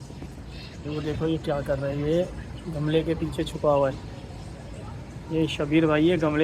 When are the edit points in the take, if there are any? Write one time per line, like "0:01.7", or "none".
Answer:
none